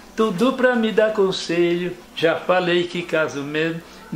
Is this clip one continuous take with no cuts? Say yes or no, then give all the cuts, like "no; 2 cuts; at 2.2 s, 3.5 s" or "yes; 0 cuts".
no; 1 cut; at 2.0 s